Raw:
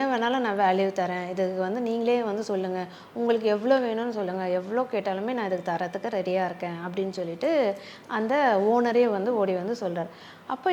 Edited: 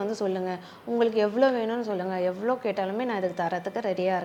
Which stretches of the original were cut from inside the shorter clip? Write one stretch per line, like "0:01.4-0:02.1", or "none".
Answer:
none